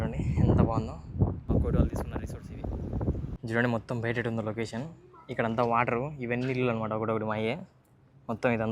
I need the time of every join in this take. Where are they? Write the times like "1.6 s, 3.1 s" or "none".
1.5 s, 3.4 s